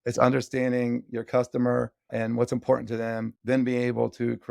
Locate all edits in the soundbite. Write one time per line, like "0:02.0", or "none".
0:02.0
0:03.4